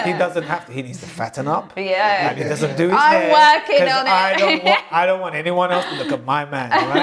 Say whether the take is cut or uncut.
uncut